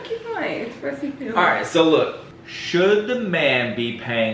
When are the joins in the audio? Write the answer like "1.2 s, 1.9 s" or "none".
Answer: 2.3 s